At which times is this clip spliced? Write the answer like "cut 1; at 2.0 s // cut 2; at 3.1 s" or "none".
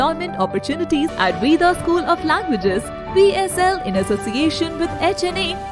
cut 1; at 1.1 s